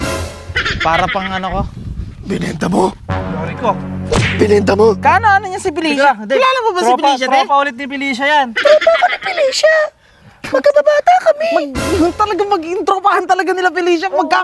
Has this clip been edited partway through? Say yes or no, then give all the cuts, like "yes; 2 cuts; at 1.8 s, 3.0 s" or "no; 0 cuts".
no; 0 cuts